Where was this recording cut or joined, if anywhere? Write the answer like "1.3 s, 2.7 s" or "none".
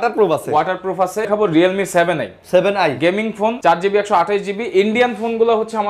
1.3 s, 3.6 s